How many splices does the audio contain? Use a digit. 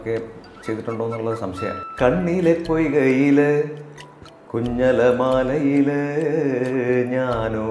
1